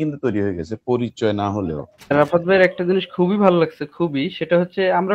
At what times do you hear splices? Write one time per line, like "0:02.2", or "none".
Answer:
0:02.1